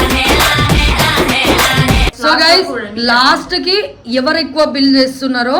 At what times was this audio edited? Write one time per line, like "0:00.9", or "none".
0:02.1